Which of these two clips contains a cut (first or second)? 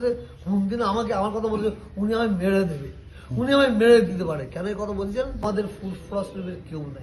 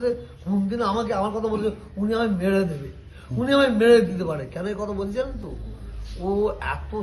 first